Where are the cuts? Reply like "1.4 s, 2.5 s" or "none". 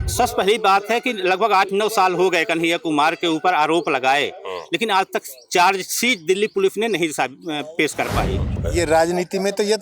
8.5 s